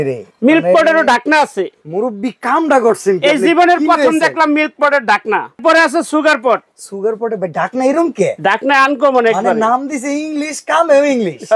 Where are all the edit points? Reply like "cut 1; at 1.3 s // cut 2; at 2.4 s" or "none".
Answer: cut 1; at 5.6 s